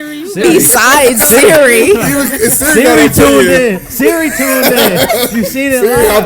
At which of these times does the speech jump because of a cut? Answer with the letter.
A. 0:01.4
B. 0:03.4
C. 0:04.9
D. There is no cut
D